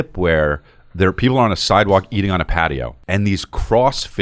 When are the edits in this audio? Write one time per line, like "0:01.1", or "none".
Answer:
0:02.9